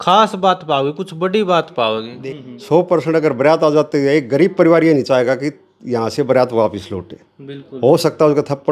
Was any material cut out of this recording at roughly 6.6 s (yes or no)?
no